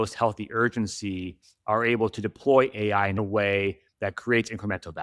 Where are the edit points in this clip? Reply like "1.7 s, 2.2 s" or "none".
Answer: none